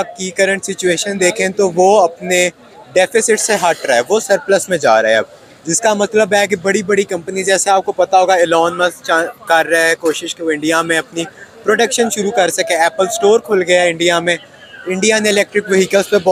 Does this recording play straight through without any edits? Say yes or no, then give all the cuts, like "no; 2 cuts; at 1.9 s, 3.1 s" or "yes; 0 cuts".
yes; 0 cuts